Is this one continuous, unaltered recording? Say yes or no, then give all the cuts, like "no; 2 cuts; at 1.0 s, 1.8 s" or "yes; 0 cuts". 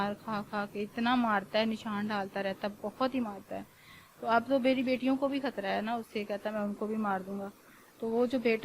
yes; 0 cuts